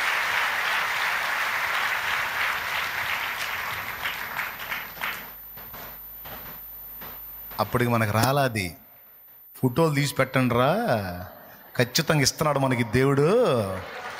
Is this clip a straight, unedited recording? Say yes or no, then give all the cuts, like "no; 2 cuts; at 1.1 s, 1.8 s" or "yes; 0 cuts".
yes; 0 cuts